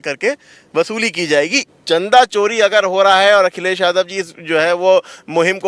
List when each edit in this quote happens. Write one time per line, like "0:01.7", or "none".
0:01.7